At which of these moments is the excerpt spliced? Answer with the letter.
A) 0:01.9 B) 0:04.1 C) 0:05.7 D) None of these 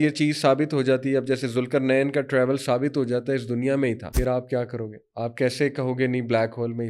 B